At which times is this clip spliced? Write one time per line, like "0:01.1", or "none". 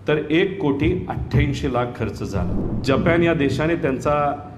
0:02.7

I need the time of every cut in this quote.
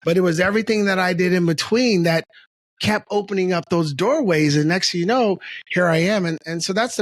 none

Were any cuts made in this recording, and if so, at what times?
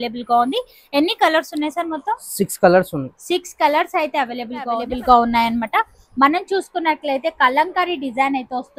0:04.9

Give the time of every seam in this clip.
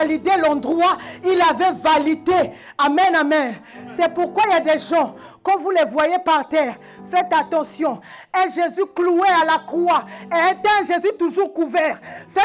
none

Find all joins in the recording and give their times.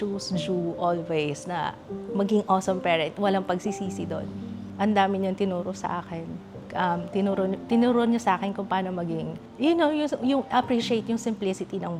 none

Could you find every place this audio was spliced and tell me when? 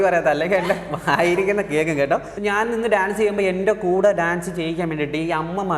0:02.3

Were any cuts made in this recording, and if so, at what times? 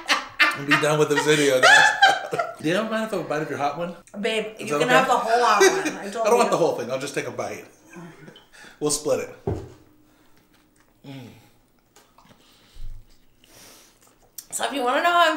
0:02.5
0:03.9

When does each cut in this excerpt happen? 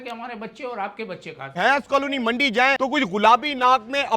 0:01.5
0:02.8

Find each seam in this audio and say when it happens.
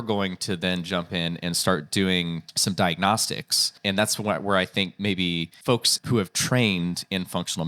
0:02.5
0:03.7
0:05.9

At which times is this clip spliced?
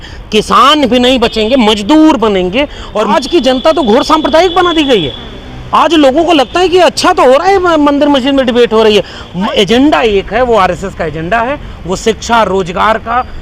0:03.1
0:09.5

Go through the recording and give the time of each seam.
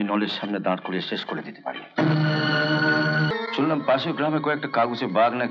0:03.3

